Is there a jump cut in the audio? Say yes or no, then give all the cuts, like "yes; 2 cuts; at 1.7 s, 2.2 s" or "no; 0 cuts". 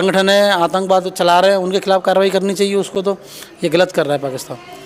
no; 0 cuts